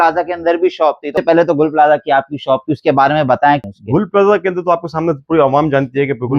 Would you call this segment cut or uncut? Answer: cut